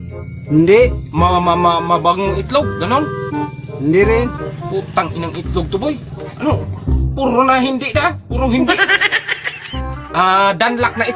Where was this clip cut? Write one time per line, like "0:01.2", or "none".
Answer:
none